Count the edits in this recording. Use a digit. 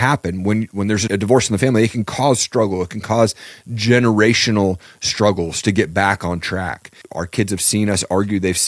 2